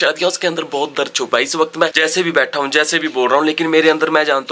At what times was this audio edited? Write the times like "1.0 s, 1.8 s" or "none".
1.9 s